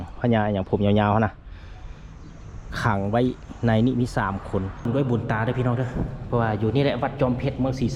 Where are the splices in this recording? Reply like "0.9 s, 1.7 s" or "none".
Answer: 4.9 s